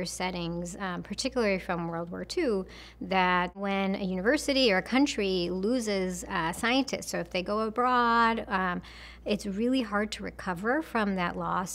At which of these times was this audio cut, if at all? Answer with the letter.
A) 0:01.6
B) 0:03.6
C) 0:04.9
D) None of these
B